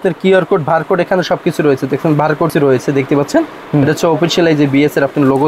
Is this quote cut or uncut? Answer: cut